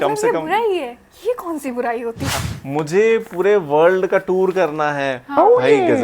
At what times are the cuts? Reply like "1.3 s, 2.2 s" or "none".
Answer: 2.5 s